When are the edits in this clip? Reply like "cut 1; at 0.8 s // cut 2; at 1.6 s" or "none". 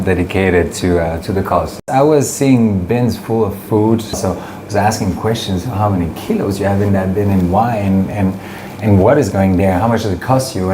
cut 1; at 1.8 s // cut 2; at 4.2 s